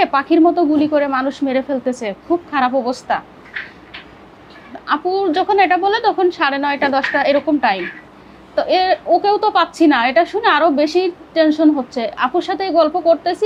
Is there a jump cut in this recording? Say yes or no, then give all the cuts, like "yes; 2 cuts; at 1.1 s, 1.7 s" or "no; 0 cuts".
no; 0 cuts